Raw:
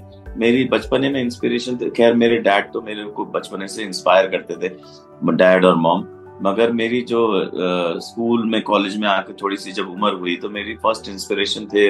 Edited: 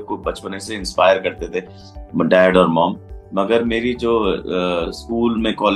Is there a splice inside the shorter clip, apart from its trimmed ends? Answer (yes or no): no